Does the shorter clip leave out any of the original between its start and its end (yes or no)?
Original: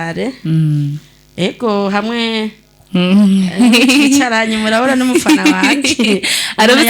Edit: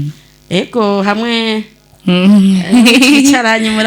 no